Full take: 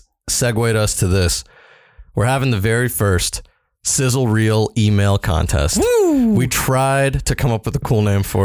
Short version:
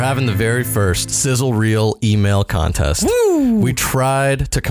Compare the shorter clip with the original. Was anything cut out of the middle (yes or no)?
yes